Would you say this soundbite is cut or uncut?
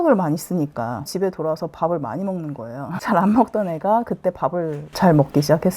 cut